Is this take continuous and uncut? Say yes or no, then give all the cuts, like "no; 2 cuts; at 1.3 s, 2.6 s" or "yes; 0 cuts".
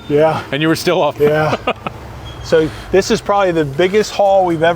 no; 1 cut; at 1.2 s